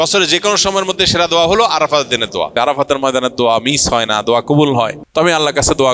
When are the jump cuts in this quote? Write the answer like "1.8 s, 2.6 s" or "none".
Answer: 2.5 s, 5.0 s